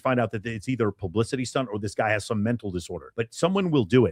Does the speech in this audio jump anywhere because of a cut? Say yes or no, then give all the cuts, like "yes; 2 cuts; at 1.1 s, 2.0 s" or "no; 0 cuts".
no; 0 cuts